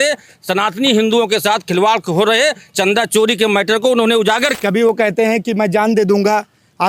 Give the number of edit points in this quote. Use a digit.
1